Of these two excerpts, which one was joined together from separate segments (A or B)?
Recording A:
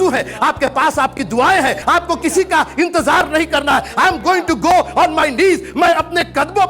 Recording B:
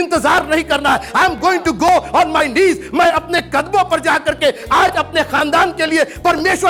A